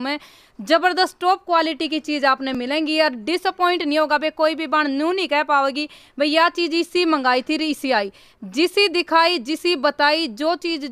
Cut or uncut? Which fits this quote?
uncut